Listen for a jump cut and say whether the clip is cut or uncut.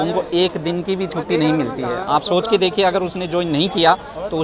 uncut